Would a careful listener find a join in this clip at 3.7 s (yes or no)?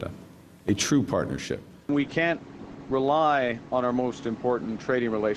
no